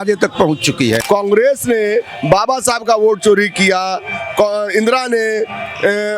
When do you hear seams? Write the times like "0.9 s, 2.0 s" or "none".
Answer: 1.0 s